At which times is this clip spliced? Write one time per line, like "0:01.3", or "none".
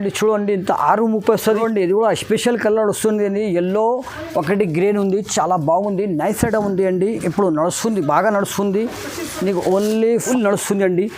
0:01.4
0:10.2

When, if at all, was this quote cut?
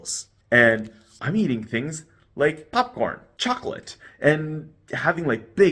0:02.6
0:03.3

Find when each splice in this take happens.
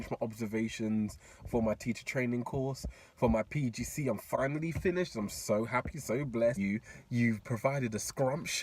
0:06.6

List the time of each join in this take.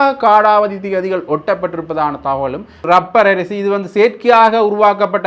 0:02.8

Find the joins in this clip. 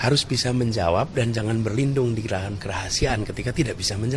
none

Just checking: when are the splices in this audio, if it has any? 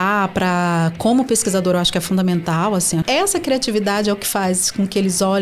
0:03.0

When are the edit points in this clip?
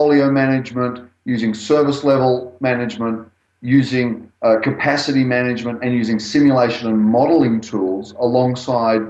none

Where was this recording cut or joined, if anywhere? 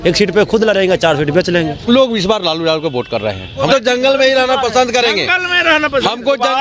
0:01.9
0:03.7

